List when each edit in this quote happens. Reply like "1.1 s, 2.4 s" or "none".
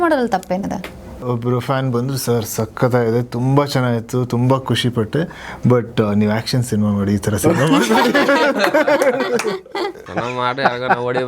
1.2 s, 10.0 s